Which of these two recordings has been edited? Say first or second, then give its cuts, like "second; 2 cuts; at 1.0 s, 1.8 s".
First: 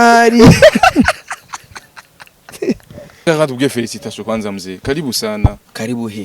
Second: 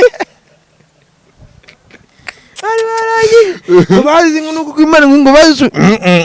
first; 1 cut; at 3.3 s